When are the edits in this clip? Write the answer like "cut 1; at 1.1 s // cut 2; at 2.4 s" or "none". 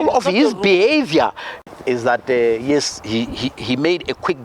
cut 1; at 1.5 s

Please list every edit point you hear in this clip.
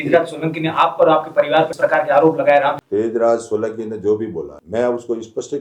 cut 1; at 1.7 s // cut 2; at 2.8 s // cut 3; at 4.6 s

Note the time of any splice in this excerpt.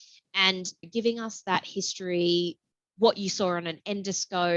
none

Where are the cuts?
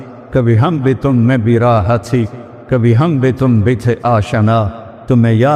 none

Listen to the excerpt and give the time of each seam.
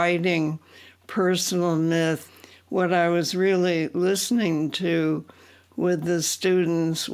cut 1; at 2.3 s

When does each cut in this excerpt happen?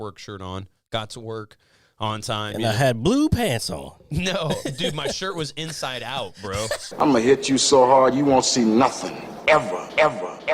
cut 1; at 7.0 s

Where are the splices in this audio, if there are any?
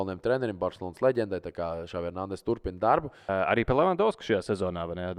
cut 1; at 3.3 s

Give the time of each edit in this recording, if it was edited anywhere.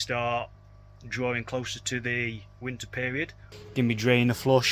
cut 1; at 3.5 s

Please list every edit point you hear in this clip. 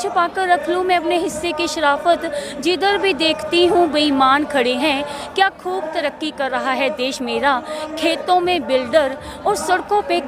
none

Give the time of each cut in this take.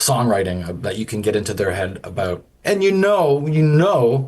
cut 1; at 2.5 s

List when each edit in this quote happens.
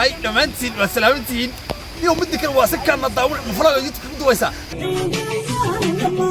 cut 1; at 4.7 s

